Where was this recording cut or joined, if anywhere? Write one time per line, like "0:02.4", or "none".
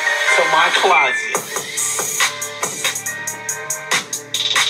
none